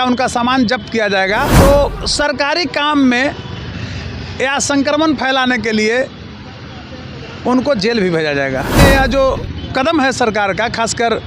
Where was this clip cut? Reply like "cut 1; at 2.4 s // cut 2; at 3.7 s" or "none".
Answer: cut 1; at 1.5 s // cut 2; at 8.8 s

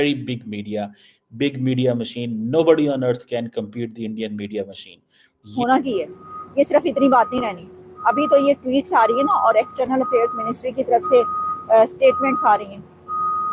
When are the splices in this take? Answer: cut 1; at 5.5 s

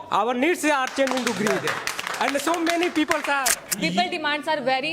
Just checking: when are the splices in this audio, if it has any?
cut 1; at 3.6 s

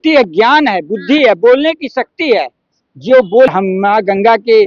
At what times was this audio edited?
cut 1; at 3.5 s

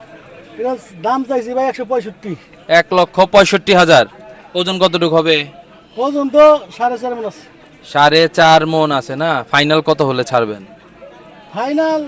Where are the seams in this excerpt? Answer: none

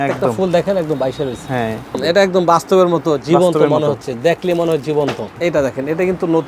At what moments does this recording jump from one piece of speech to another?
cut 1; at 2.0 s // cut 2; at 5.3 s

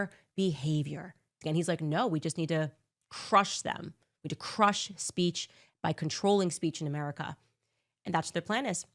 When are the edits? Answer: cut 1; at 1.4 s

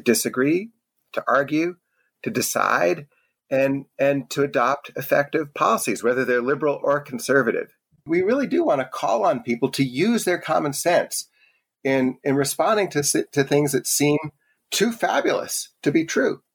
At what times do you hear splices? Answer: cut 1; at 8.1 s // cut 2; at 14.6 s

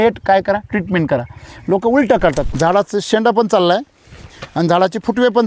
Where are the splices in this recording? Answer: cut 1; at 2.5 s

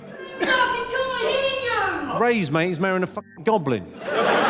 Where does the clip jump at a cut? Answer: cut 1; at 2.1 s

